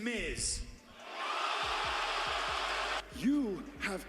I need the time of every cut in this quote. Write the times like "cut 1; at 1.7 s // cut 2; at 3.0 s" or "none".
cut 1; at 3.0 s